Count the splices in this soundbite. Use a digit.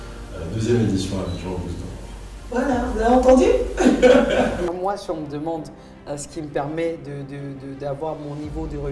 1